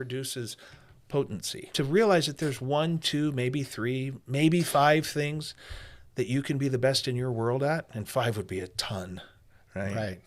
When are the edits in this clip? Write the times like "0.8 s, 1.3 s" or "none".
1.7 s